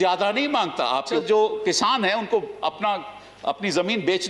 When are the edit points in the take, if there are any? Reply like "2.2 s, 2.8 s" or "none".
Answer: 1.0 s